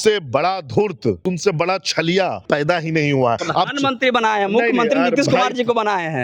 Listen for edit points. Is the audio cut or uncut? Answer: cut